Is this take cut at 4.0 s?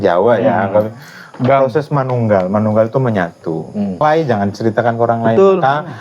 yes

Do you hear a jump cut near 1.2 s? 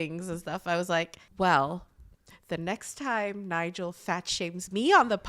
yes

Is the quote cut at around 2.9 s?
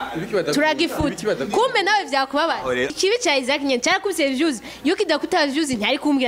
yes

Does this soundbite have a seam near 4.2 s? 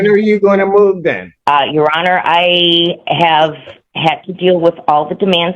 no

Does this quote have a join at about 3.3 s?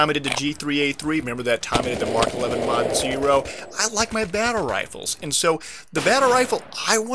yes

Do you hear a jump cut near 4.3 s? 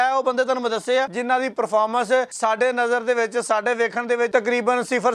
yes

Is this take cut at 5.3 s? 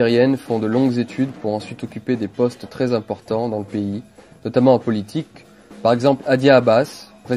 no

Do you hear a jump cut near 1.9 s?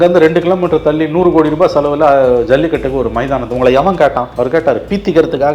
no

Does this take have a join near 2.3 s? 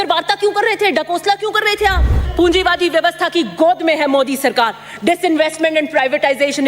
yes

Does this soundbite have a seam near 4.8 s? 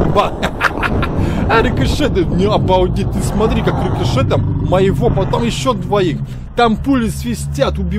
no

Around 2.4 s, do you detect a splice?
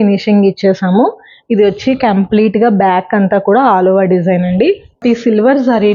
no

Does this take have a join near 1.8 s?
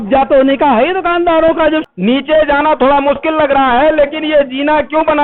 yes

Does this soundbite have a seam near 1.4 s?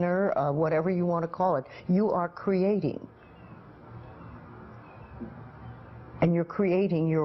yes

